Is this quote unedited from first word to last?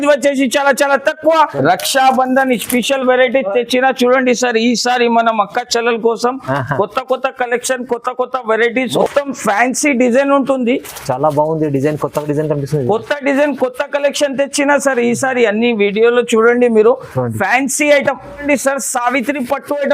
no; 3 cuts; at 1.5 s, 8.9 s, 18.4 s

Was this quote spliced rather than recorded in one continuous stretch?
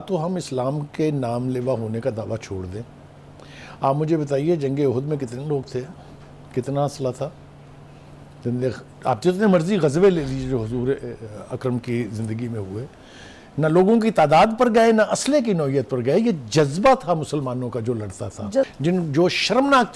yes; 1 cut; at 18.7 s

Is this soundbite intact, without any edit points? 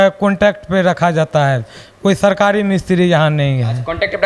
yes; 0 cuts

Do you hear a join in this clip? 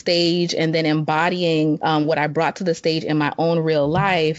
yes; 1 cut; at 1.8 s

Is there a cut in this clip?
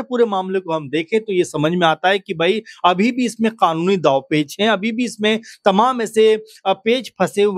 no; 0 cuts

